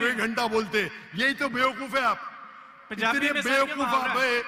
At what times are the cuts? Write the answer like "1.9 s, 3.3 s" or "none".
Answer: none